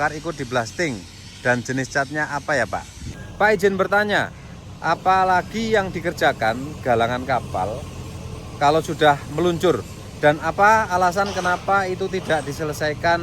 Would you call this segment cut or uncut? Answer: cut